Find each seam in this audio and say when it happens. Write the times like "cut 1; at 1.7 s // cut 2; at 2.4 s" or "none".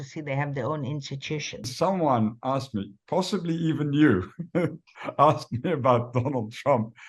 cut 1; at 1.7 s